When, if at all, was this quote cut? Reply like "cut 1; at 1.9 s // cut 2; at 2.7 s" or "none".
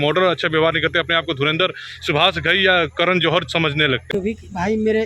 cut 1; at 4.1 s